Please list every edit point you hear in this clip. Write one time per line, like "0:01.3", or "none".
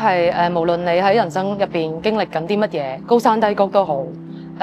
0:03.0